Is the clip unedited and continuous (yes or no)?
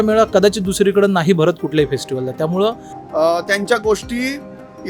no